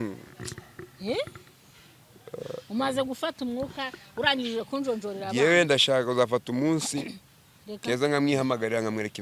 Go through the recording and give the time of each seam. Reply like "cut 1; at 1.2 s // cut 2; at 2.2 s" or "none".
none